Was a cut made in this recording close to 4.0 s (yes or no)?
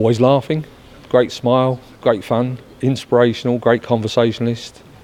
no